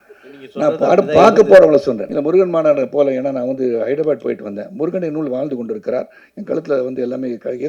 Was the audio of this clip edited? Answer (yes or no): yes